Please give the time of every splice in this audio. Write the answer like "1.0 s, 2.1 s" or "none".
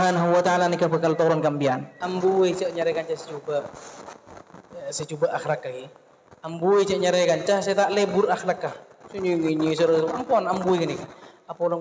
1.9 s